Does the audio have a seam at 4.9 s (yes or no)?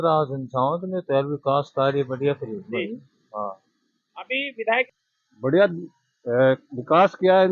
yes